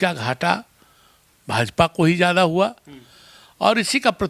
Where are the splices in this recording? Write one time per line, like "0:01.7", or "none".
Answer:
none

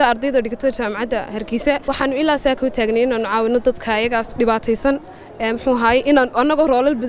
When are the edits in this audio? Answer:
0:01.9

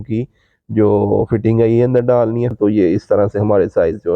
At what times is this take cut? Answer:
0:02.5

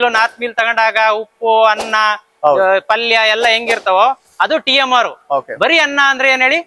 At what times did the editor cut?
none

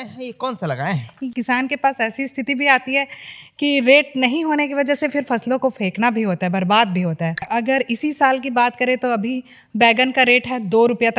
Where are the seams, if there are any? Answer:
0:01.3
0:07.5

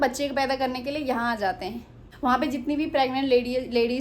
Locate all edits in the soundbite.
0:02.0

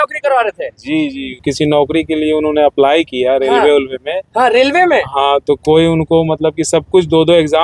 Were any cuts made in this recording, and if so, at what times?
0:01.4

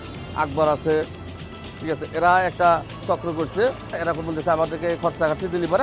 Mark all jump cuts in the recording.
0:04.0

